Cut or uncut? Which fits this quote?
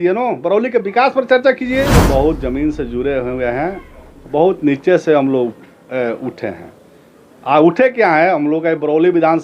cut